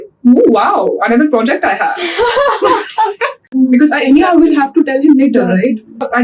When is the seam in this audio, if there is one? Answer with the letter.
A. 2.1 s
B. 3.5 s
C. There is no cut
B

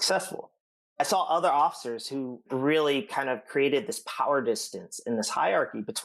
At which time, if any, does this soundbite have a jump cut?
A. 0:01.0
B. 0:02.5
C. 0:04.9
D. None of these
B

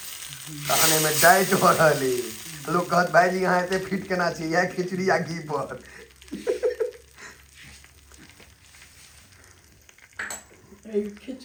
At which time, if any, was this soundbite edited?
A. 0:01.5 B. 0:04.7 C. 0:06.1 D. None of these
D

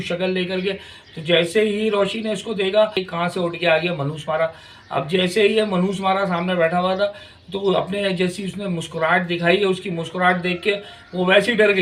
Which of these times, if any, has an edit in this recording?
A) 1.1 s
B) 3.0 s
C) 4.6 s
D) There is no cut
B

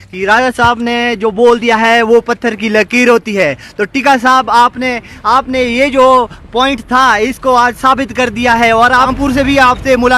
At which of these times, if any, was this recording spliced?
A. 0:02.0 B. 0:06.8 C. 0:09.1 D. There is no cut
C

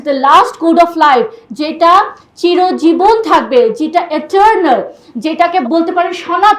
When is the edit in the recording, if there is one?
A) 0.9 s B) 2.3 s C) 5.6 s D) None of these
C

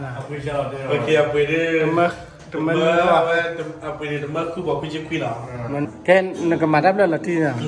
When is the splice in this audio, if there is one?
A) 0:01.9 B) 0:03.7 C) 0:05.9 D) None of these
C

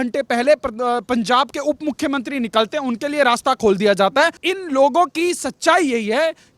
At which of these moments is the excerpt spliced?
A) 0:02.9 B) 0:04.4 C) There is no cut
B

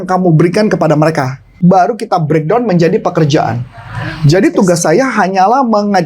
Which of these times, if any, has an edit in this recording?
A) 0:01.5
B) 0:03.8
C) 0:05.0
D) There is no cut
A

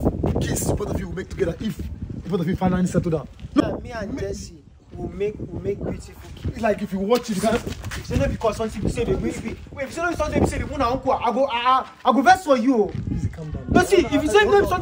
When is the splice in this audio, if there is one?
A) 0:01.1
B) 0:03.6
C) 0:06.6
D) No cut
B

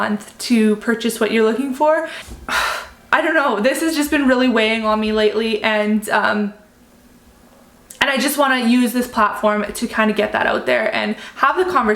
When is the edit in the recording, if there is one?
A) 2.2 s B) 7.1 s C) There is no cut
A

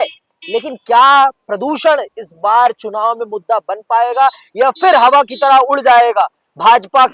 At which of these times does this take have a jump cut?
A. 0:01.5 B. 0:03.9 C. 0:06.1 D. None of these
D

